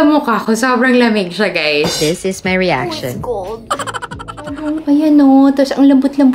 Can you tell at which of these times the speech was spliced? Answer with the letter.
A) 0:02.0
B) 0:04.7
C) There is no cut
B